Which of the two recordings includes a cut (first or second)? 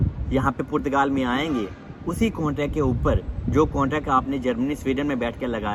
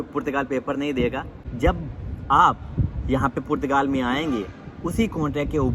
second